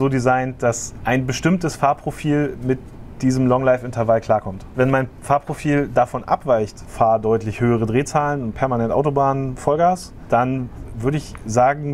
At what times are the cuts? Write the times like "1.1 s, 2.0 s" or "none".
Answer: 4.7 s, 6.9 s, 10.1 s